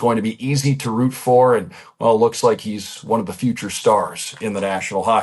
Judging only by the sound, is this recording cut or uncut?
uncut